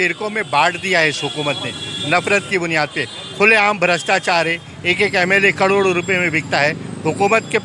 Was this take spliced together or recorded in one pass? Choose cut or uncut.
uncut